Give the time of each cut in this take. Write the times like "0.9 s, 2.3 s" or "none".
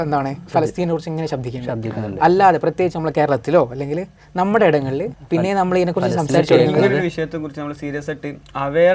5.1 s

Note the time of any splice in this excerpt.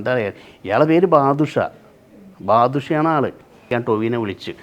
3.7 s

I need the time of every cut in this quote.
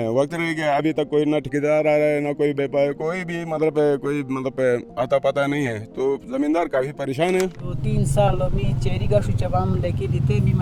none

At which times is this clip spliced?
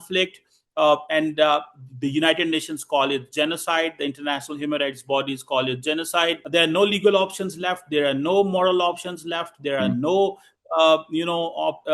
6.4 s

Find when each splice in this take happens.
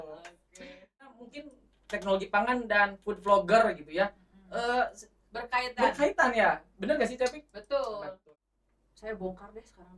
1.2 s, 8.1 s

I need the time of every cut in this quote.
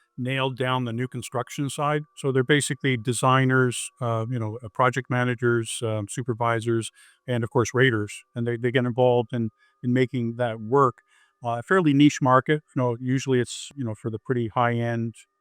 13.7 s

